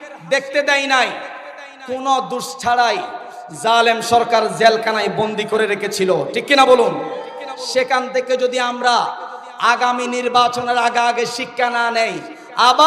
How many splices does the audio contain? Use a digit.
0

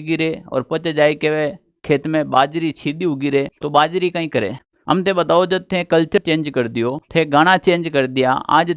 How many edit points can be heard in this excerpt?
3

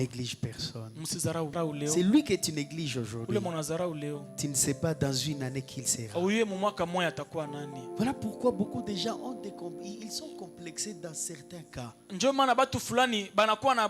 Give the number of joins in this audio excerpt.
1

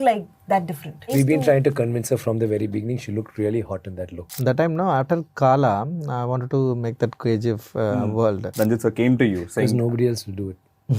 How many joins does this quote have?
3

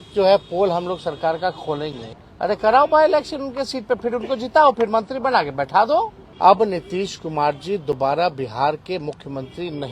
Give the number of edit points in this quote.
2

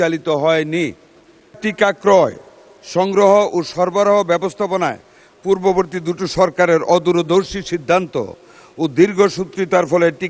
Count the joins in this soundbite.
1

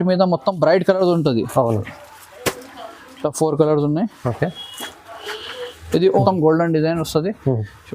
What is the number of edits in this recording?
1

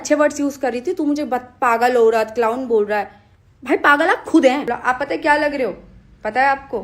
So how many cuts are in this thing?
1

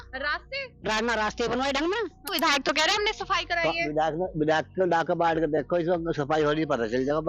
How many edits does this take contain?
1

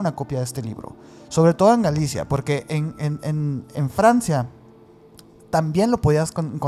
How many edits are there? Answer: 0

